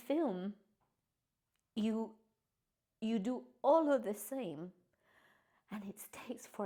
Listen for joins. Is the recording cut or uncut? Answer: uncut